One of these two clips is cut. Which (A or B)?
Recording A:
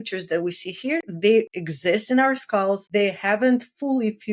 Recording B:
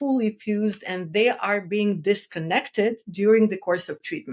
A